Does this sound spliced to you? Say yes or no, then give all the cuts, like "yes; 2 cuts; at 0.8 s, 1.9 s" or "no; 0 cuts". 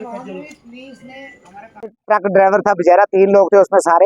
yes; 1 cut; at 1.7 s